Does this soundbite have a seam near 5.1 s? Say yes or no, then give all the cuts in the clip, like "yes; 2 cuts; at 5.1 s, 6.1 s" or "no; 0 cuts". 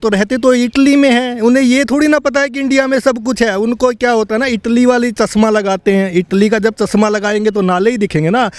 no; 0 cuts